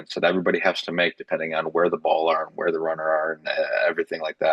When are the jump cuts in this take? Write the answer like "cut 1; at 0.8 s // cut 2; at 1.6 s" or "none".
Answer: none